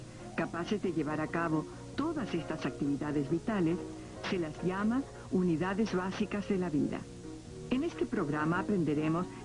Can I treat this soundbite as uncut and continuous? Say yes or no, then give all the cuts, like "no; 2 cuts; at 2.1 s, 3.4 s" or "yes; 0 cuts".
yes; 0 cuts